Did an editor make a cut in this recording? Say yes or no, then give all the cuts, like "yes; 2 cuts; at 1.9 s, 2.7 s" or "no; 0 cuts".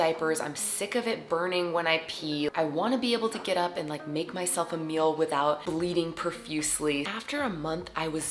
no; 0 cuts